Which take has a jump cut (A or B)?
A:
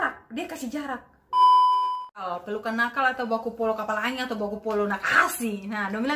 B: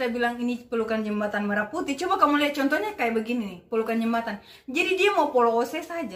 A